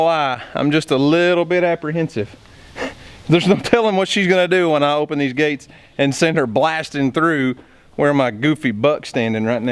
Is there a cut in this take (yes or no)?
no